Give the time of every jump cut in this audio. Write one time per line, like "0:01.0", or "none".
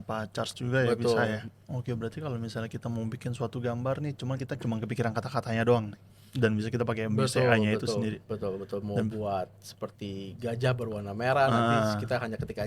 0:01.5